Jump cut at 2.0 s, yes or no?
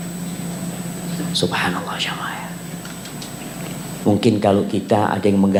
no